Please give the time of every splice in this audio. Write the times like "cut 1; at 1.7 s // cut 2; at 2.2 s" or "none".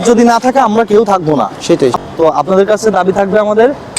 cut 1; at 1.9 s